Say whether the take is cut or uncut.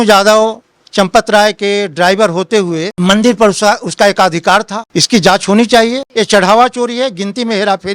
cut